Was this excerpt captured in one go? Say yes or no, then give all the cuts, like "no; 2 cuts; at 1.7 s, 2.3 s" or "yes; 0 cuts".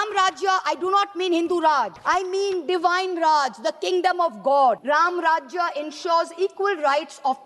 no; 2 cuts; at 2.0 s, 4.8 s